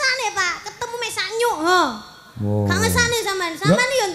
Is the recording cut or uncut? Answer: uncut